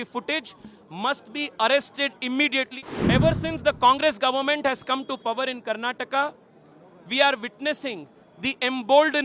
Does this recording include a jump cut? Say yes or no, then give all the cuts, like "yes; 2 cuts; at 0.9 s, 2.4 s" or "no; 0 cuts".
yes; 1 cut; at 2.7 s